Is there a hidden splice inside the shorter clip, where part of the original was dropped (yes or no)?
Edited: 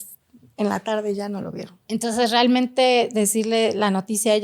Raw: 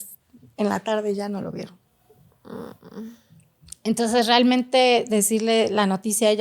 yes